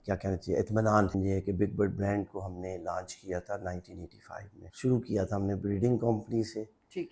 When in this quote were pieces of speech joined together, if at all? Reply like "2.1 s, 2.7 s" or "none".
1.1 s, 4.6 s

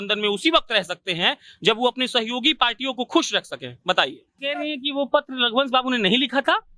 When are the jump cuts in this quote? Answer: 4.4 s

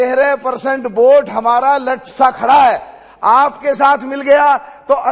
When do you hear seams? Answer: none

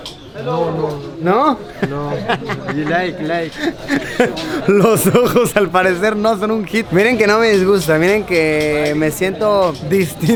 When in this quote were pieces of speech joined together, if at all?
none

